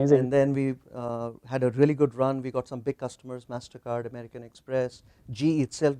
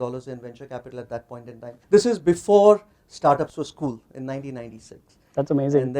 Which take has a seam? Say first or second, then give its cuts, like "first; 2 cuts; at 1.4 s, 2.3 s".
second; 1 cut; at 1.8 s